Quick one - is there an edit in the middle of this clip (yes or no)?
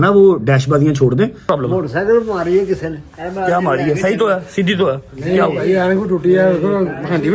yes